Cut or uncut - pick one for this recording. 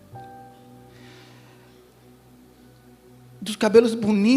uncut